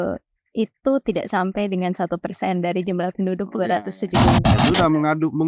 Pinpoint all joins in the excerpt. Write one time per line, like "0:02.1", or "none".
0:04.5

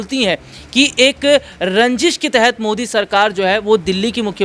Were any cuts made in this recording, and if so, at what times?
none

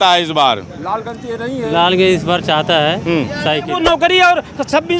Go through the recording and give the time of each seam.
0:03.7

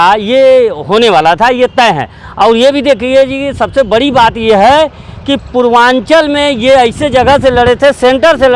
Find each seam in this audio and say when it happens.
none

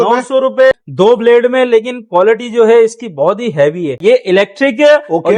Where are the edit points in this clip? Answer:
0:00.7
0:04.0

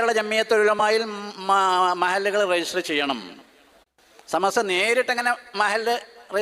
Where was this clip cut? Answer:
none

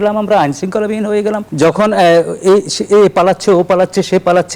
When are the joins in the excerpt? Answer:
0:01.4

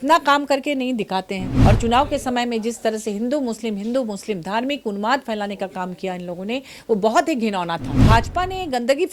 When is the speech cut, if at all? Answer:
0:01.5
0:08.0

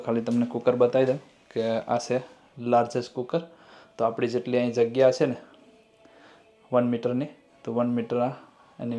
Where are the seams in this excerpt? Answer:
none

